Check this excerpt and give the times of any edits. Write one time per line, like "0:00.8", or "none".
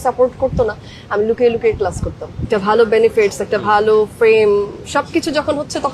0:02.4

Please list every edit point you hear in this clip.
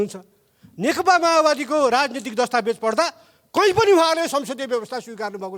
none

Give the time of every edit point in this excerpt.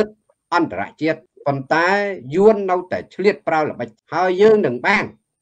0:01.3
0:03.9

